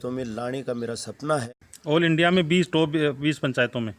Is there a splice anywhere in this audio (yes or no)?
yes